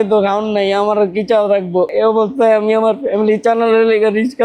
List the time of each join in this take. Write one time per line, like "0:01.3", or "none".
0:01.9

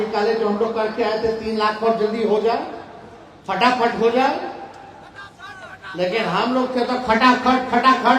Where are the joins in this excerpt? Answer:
none

